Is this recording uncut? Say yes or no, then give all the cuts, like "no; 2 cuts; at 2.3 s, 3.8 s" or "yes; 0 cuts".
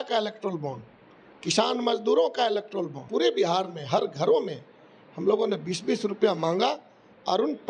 no; 1 cut; at 3.0 s